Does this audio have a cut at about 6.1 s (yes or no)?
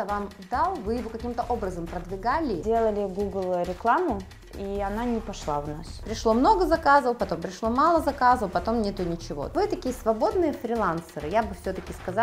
yes